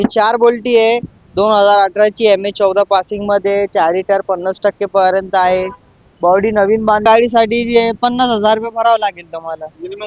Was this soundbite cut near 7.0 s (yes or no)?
yes